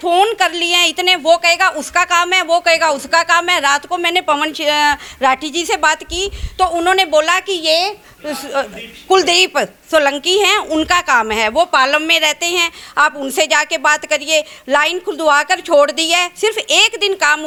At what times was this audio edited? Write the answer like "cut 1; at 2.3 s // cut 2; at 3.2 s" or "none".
none